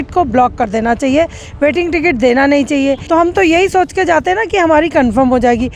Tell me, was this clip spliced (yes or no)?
yes